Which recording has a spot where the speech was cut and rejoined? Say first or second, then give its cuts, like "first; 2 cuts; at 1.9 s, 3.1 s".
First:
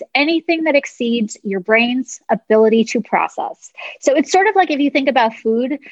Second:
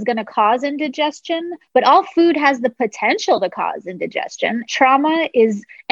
second; 1 cut; at 4.6 s